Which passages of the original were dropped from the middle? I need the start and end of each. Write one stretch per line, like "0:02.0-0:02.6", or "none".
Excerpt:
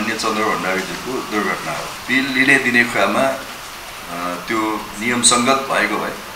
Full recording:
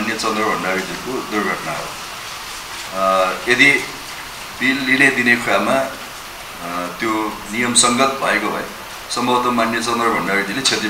0:01.9-0:04.4